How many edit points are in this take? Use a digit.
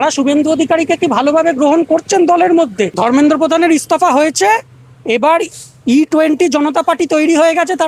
1